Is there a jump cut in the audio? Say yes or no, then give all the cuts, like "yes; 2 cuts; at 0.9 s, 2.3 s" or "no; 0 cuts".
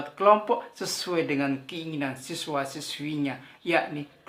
no; 0 cuts